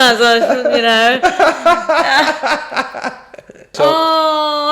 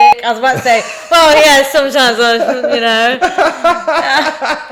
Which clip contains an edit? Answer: first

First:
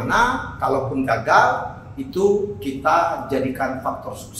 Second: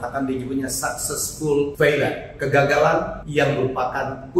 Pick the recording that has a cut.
second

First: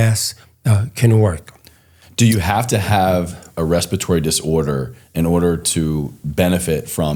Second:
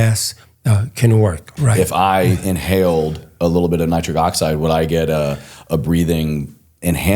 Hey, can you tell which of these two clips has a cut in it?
second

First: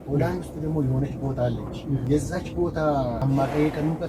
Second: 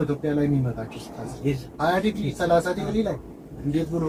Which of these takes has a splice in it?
first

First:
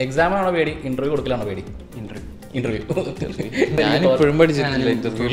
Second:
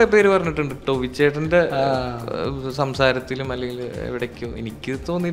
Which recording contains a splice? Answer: first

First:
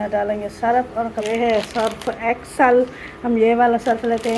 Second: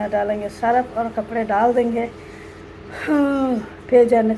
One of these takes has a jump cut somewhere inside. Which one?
first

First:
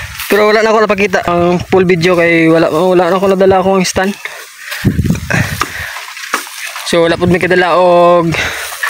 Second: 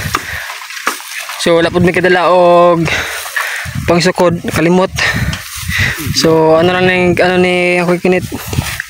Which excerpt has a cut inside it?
first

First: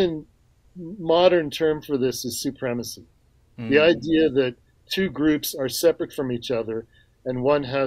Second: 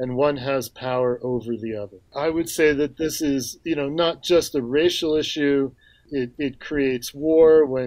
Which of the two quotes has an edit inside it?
second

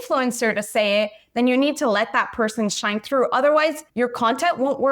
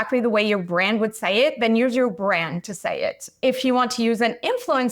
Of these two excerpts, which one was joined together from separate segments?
first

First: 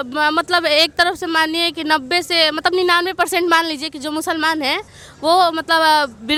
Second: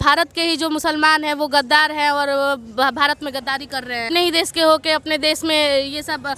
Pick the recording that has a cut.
second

